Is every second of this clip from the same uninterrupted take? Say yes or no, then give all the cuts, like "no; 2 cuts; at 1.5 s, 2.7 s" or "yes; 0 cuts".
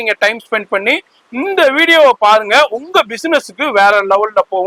yes; 0 cuts